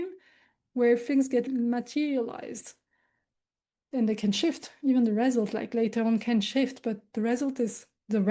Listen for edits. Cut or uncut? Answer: cut